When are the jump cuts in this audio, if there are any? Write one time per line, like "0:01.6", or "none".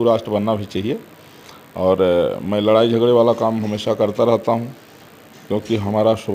none